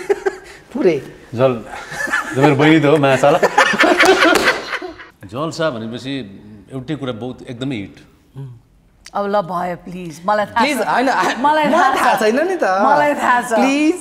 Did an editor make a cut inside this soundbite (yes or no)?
yes